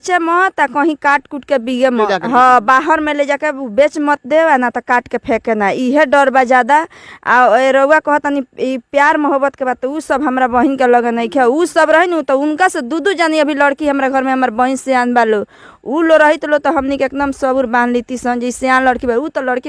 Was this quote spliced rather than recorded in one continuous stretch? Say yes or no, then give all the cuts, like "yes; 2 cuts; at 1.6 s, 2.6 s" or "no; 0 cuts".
no; 0 cuts